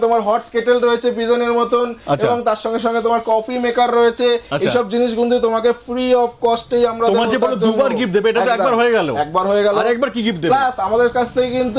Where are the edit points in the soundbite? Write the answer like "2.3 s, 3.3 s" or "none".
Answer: none